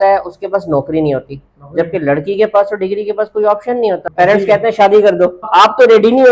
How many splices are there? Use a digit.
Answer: 2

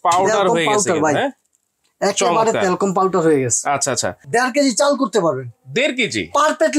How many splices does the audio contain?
1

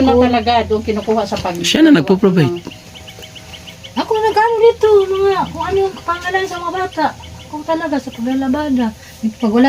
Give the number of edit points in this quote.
0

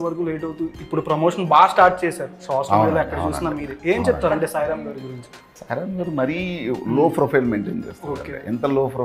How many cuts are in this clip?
1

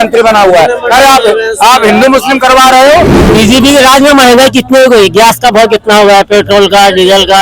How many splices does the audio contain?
1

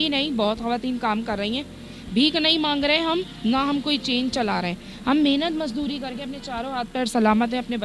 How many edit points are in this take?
0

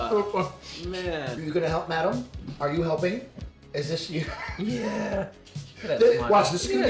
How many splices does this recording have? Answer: 1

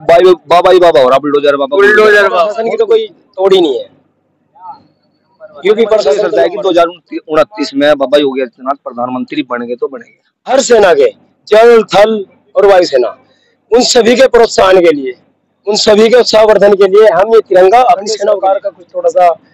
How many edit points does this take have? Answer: 4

